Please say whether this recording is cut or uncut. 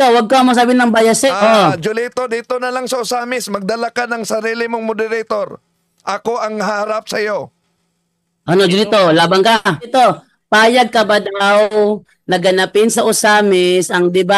cut